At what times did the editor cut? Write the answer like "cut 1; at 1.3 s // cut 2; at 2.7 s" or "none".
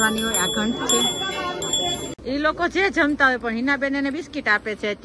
cut 1; at 2.2 s